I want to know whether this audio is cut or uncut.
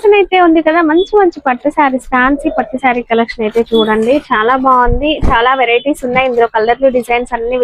uncut